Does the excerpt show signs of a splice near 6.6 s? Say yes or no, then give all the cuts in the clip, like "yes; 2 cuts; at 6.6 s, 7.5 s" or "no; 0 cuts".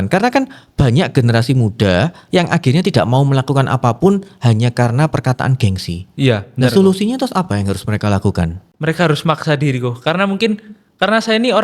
no; 1 cut; at 8.6 s